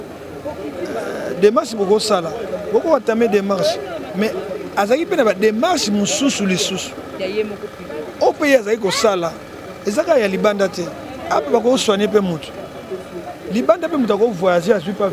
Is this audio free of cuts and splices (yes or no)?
yes